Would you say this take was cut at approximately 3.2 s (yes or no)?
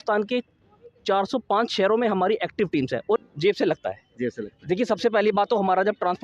yes